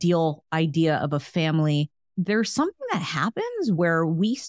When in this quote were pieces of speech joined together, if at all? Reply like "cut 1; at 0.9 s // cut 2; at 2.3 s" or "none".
cut 1; at 2.0 s